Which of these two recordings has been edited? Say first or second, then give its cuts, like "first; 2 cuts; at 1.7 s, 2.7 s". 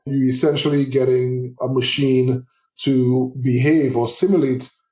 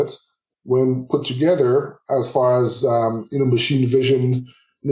first; 1 cut; at 1.5 s